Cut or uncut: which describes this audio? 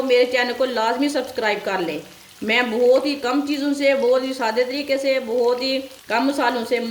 cut